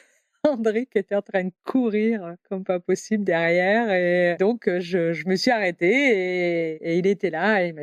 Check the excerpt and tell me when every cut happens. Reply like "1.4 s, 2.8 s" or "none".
4.4 s, 6.8 s